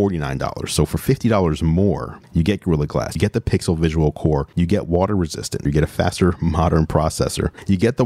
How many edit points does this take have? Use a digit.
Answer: 1